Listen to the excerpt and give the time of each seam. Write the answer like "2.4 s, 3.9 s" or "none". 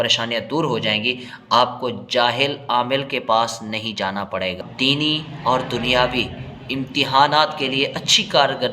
4.6 s